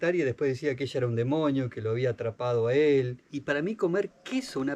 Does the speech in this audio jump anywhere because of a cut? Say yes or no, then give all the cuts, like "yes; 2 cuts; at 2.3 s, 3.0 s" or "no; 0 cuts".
yes; 1 cut; at 3.3 s